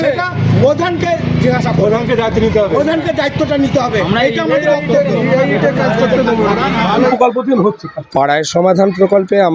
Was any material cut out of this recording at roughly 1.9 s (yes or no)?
no